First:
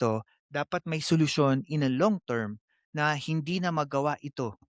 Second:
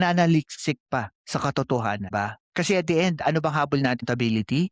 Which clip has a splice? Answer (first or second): second